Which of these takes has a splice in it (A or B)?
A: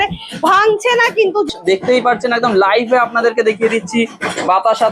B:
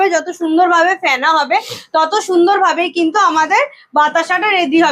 A